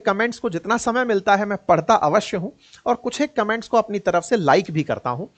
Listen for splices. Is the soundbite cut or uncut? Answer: uncut